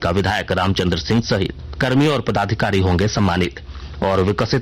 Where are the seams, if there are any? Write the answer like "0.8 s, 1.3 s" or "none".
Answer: 1.8 s, 3.5 s